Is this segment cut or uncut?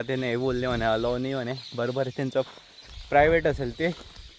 uncut